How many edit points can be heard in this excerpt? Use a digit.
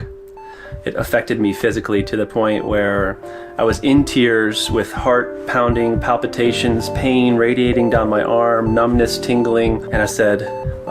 1